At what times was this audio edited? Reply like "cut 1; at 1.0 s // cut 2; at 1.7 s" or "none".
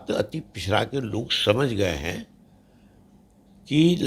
none